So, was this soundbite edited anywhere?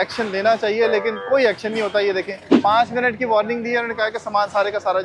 yes; 1 cut; at 2.5 s

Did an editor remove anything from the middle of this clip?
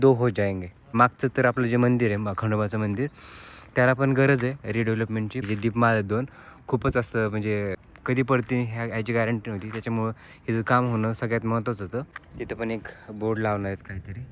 yes; 4 cuts; at 0.8 s, 5.4 s, 7.9 s, 12.2 s

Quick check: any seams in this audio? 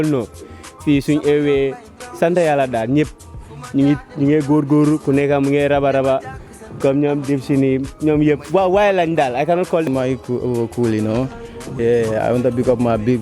yes; 1 cut; at 9.9 s

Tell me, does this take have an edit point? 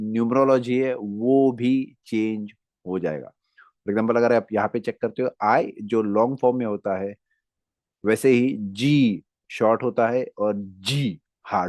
no; 0 cuts

